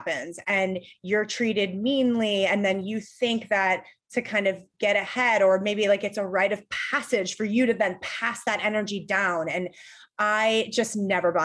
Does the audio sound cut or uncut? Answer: uncut